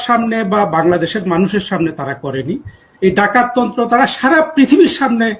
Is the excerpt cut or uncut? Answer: uncut